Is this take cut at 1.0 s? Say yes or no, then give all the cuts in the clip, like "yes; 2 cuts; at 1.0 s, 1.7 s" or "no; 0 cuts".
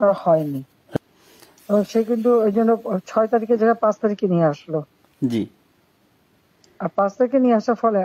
yes; 1 cut; at 1.0 s